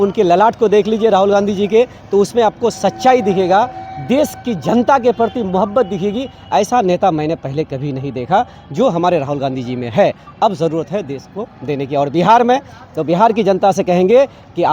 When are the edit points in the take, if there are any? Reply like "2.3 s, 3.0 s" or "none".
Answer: none